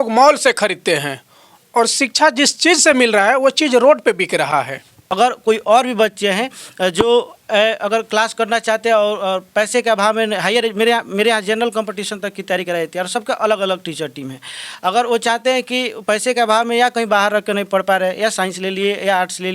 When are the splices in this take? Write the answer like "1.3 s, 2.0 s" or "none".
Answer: 5.0 s